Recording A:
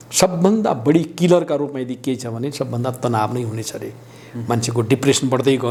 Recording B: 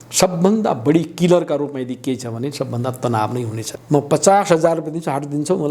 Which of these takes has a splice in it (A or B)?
B